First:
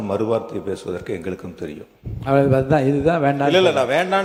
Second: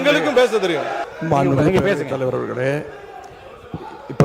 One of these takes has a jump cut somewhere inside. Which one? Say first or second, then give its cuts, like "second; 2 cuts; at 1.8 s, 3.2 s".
second; 1 cut; at 1.1 s